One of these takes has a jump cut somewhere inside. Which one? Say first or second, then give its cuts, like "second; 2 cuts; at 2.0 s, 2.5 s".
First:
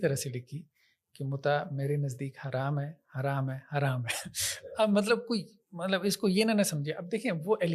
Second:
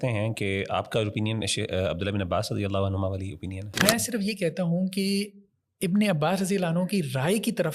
second; 1 cut; at 3.7 s